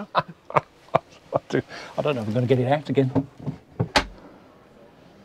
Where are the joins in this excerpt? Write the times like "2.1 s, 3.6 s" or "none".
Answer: 3.9 s